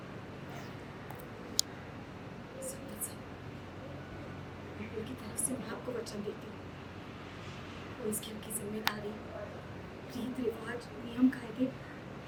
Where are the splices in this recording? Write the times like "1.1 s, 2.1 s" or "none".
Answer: none